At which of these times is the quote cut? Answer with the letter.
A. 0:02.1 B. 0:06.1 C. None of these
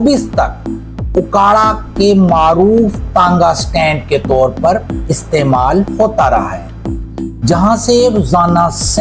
C